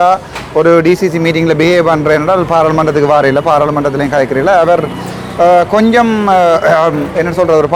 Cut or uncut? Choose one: uncut